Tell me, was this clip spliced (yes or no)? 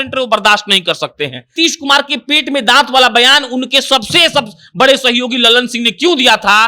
yes